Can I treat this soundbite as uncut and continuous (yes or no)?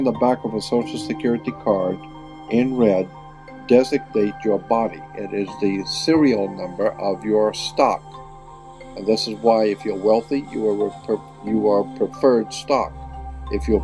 yes